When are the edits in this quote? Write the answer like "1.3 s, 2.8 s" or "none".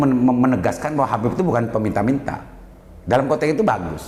none